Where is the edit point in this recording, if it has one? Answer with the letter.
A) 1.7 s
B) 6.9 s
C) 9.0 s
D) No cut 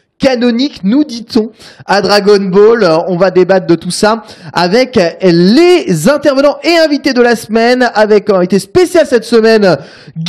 B